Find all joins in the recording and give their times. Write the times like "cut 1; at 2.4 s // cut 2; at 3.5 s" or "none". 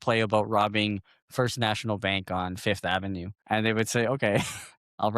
cut 1; at 3.3 s